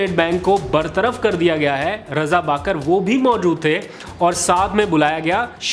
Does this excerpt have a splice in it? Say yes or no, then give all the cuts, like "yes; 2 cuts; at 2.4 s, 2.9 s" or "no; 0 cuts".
no; 0 cuts